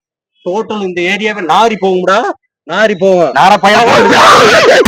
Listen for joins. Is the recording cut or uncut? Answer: uncut